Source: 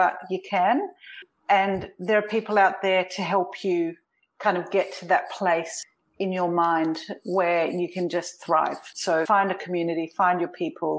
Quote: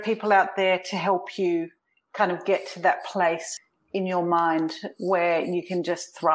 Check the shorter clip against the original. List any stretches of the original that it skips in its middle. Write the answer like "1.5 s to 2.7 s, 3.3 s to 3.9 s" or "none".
none